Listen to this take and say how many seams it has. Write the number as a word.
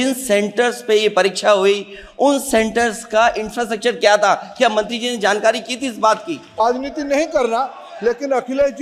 one